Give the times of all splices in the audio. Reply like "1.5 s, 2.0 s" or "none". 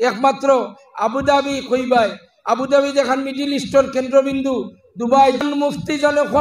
5.4 s

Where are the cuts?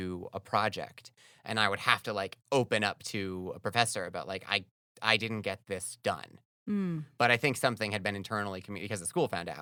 none

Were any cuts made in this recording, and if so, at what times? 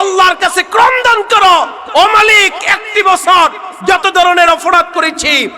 none

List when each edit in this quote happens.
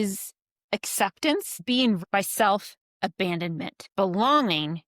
2.0 s, 3.8 s

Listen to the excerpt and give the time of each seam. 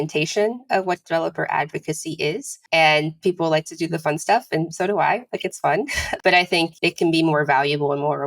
2.5 s, 6.0 s, 6.7 s

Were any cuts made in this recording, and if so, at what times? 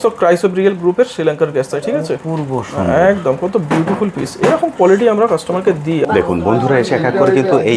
6.0 s

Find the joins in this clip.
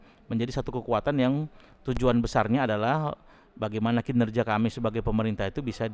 none

